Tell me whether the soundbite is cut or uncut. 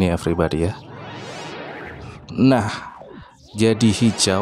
uncut